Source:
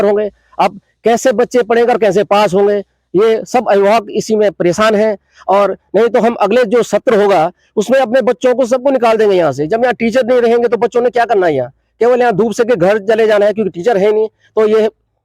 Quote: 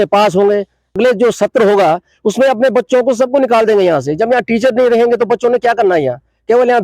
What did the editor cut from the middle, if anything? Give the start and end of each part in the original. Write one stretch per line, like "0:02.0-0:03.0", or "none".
0:03.1-0:06.5